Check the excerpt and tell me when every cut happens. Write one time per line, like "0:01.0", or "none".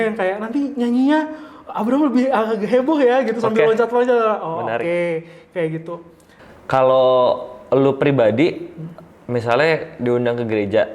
0:06.4